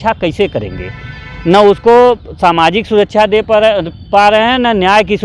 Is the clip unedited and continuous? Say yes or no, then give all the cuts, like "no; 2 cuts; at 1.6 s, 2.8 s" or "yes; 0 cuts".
yes; 0 cuts